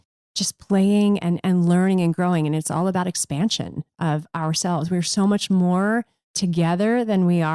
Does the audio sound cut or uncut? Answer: uncut